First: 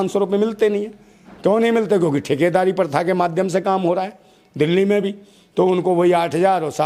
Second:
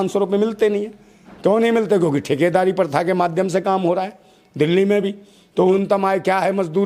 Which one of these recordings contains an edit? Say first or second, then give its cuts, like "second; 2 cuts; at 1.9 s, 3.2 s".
second; 1 cut; at 5.7 s